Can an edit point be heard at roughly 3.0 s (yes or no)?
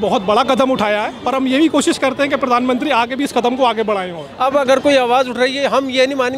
no